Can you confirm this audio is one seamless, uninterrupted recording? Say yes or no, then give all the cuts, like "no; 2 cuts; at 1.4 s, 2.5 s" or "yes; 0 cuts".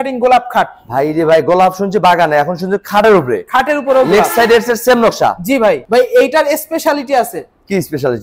no; 1 cut; at 5.8 s